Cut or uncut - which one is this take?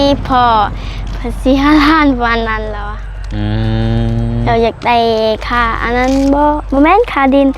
uncut